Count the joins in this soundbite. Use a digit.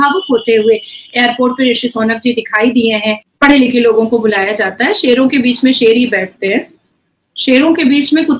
1